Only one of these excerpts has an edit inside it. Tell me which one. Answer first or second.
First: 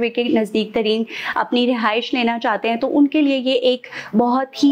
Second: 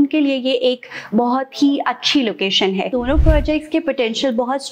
second